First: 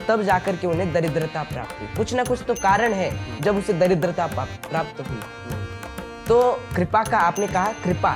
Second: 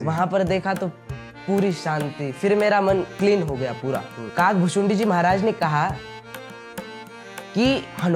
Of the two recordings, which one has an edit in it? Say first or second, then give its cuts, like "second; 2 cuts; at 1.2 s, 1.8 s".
second; 1 cut; at 4.1 s